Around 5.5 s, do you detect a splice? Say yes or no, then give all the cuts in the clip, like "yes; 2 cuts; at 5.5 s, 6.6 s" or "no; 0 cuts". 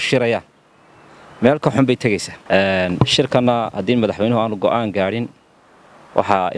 no; 1 cut; at 2.3 s